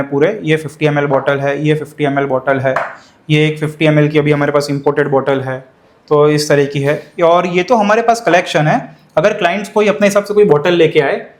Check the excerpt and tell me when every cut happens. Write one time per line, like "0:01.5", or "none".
none